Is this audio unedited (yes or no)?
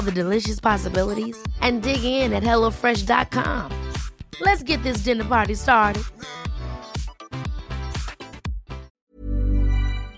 no